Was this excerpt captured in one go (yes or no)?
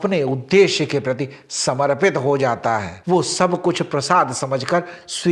yes